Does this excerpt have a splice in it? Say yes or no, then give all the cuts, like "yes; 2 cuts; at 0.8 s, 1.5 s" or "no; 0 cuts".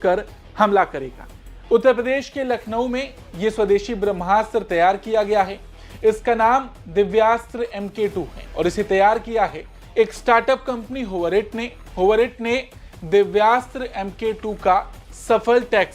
no; 0 cuts